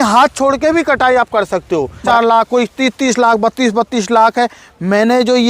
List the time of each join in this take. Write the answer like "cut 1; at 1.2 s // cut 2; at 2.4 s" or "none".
cut 1; at 2.0 s